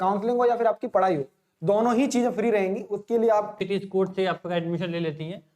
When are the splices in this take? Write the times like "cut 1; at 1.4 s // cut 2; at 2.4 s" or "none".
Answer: cut 1; at 3.6 s